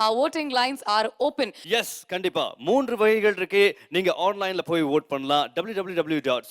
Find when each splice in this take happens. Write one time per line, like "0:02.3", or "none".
0:01.6